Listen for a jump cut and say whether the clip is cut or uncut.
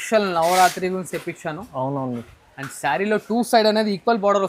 uncut